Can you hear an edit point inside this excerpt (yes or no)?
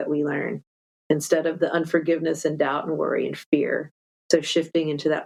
no